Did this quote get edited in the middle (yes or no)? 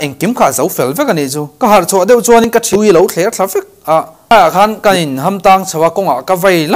yes